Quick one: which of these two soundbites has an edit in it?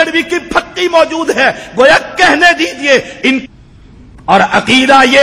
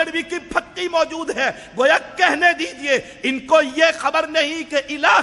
first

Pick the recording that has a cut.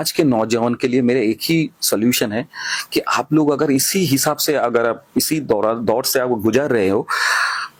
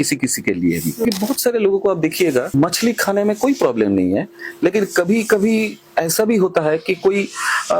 second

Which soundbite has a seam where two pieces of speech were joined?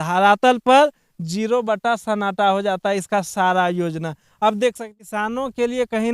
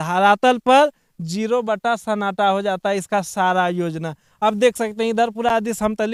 first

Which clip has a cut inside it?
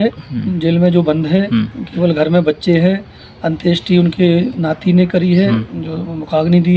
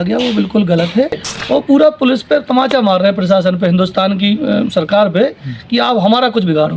second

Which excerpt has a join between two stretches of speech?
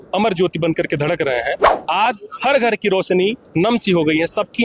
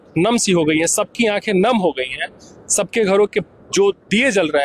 first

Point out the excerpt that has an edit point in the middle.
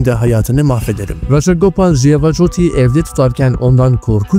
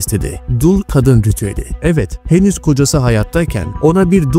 first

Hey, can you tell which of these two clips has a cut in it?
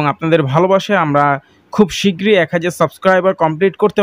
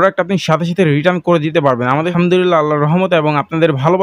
second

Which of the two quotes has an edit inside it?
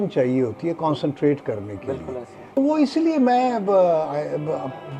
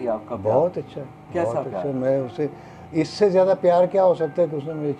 first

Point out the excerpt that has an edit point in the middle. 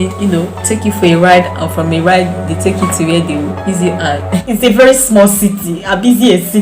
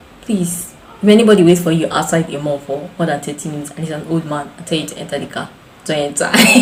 first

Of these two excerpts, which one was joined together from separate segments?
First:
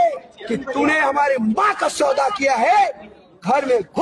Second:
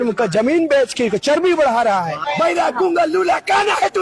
second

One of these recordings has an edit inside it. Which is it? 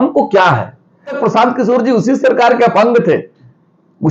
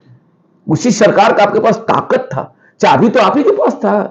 first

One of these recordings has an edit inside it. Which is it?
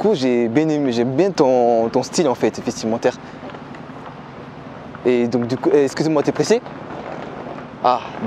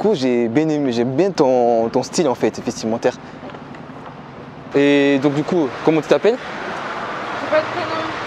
second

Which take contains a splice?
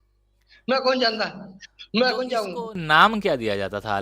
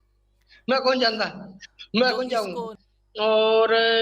second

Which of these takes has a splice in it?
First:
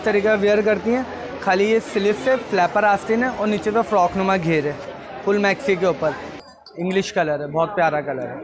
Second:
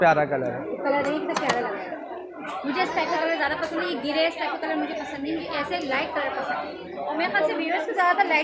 first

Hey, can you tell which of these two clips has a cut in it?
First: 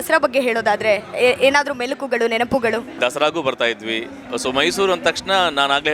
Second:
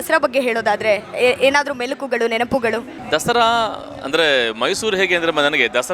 first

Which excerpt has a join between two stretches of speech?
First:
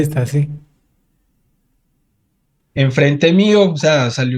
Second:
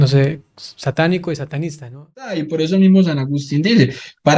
second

